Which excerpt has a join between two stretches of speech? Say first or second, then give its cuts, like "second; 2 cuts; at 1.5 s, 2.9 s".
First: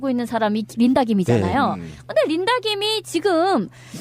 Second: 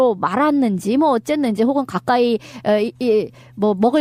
first; 1 cut; at 1.3 s